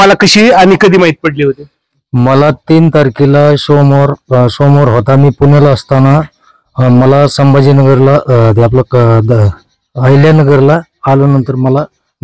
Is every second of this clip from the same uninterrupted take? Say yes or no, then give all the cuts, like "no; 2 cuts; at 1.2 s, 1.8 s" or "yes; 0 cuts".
yes; 0 cuts